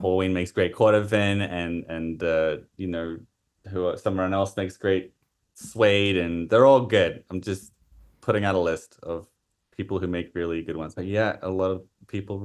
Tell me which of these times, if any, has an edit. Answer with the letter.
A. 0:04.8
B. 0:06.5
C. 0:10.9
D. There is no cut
C